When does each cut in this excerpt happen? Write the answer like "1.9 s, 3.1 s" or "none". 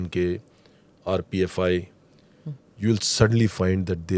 none